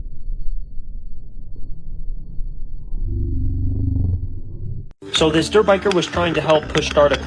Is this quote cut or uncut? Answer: cut